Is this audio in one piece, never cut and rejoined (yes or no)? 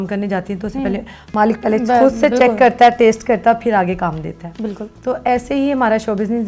yes